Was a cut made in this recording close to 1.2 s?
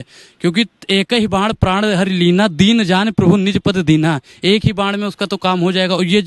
no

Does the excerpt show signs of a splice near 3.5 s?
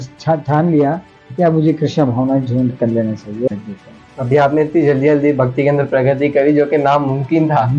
yes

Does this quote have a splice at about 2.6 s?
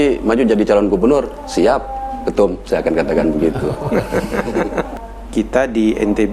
no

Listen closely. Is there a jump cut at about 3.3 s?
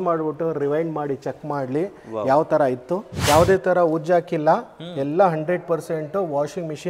yes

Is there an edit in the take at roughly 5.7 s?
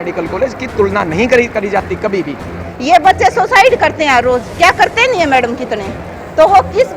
no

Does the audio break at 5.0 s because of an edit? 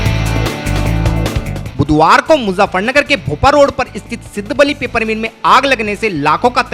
no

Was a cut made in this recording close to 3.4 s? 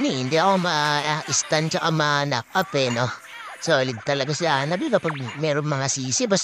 no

